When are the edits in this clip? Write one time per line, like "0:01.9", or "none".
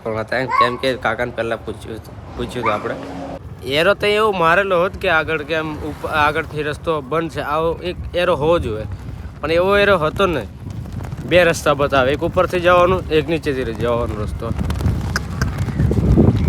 0:03.3